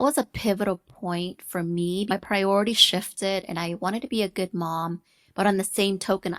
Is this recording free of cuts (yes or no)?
no